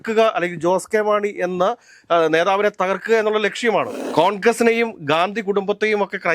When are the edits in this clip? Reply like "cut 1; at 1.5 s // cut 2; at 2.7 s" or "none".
cut 1; at 4.0 s

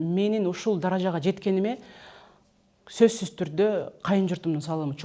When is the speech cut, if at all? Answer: none

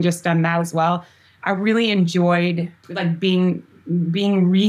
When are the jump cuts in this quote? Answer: cut 1; at 2.8 s

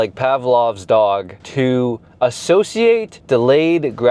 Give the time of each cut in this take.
cut 1; at 1.4 s // cut 2; at 3.1 s

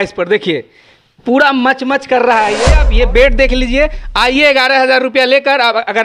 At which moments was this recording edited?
cut 1; at 2.8 s

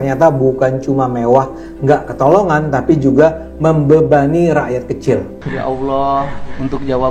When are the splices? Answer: cut 1; at 5.4 s

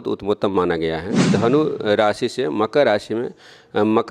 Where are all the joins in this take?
cut 1; at 1.2 s

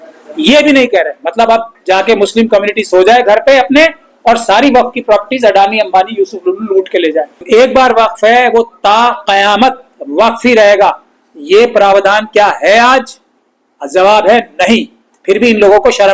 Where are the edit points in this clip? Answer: cut 1; at 7.4 s

